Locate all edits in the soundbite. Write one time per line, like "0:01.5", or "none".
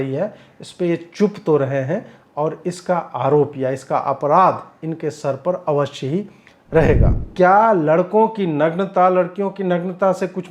0:07.2